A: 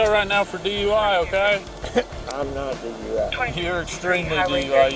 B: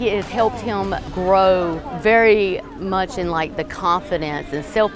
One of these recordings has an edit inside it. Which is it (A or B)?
B